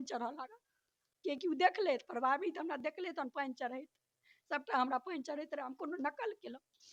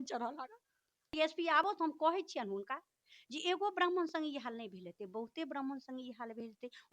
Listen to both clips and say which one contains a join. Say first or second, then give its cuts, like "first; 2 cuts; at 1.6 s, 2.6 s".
second; 1 cut; at 1.1 s